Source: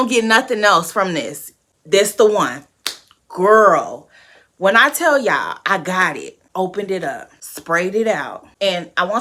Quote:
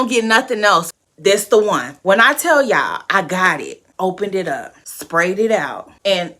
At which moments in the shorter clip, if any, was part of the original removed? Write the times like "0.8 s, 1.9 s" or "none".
0.9 s, 1.9 s